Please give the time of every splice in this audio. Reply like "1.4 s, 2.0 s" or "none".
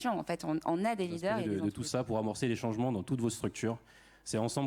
1.4 s